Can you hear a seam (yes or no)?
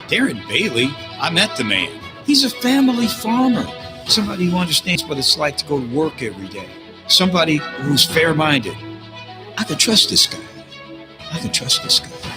yes